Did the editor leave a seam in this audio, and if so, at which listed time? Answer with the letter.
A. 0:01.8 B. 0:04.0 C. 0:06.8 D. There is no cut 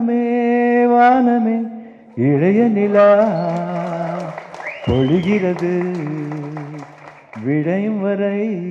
D